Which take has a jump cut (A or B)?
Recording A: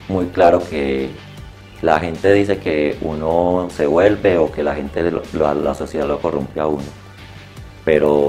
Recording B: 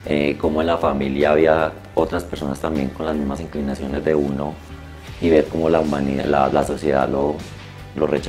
B